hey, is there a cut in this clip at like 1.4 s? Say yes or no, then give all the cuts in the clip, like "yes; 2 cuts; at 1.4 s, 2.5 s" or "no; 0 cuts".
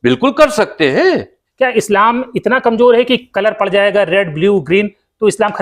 yes; 1 cut; at 1.4 s